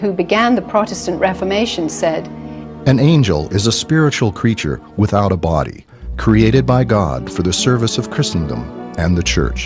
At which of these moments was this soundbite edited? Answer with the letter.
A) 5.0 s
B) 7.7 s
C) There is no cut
A